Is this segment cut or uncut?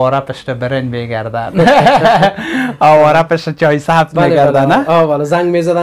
uncut